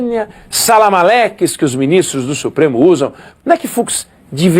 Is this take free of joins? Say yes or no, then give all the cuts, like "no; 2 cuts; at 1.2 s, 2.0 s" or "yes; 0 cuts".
no; 1 cut; at 3.2 s